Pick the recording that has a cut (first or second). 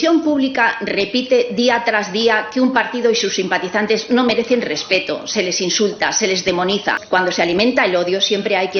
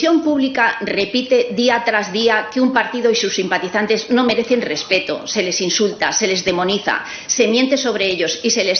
first